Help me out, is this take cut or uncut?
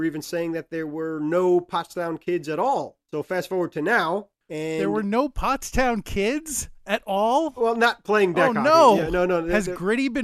uncut